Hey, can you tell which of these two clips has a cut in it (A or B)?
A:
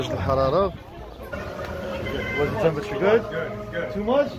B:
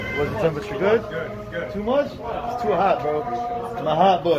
A